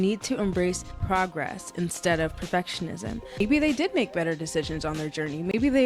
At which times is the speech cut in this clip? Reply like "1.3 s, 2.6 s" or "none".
0.9 s, 3.4 s